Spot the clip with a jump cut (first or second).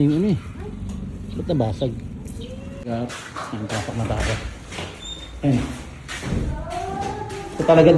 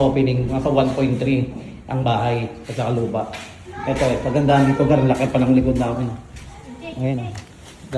first